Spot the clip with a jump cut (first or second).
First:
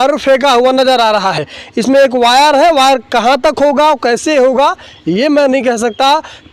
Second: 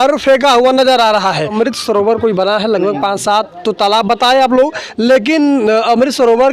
second